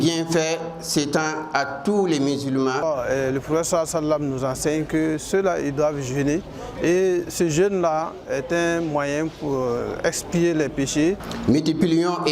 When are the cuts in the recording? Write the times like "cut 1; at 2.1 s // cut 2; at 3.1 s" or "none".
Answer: cut 1; at 2.8 s // cut 2; at 11.3 s